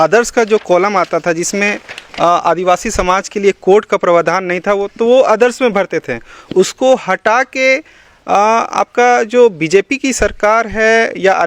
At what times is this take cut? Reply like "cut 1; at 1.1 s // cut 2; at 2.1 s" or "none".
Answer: none